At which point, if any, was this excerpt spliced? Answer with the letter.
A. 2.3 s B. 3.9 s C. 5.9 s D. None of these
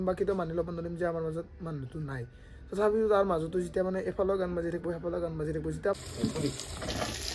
C